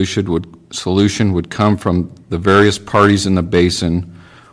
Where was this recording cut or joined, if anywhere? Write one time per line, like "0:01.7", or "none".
none